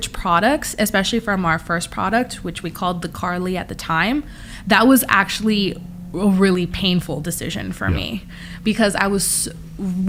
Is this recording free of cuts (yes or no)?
yes